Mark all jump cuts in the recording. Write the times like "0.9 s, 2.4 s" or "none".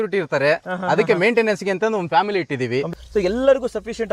2.9 s